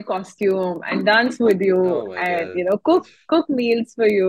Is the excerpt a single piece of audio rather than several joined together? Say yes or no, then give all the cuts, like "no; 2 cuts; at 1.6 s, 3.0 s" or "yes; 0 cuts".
yes; 0 cuts